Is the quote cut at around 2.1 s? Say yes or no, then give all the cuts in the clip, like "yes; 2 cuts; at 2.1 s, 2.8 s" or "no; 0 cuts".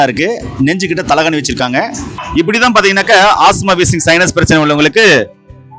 yes; 1 cut; at 2.1 s